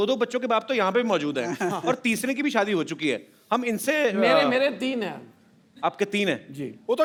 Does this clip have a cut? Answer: no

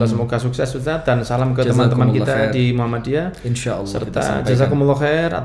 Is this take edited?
no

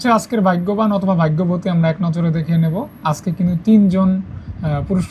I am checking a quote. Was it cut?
no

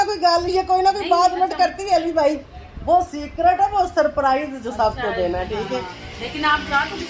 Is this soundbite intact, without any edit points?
yes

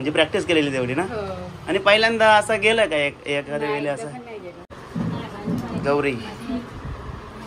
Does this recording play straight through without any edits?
no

